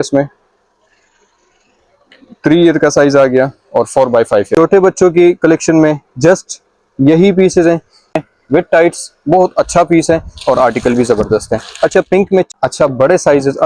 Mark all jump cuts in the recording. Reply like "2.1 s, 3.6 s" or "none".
4.5 s, 8.2 s, 12.5 s